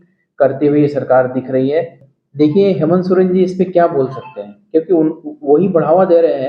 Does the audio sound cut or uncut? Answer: cut